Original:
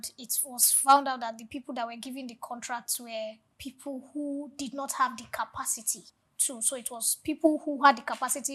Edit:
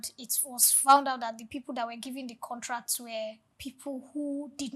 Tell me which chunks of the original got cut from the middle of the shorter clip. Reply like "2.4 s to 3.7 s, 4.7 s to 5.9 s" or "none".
none